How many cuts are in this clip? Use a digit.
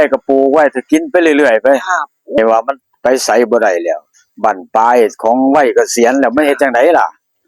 1